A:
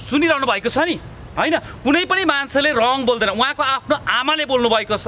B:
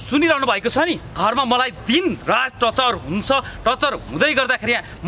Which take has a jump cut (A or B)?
B